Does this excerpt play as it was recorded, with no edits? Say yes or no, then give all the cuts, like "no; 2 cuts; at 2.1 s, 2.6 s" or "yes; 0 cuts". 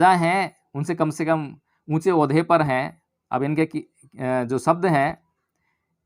yes; 0 cuts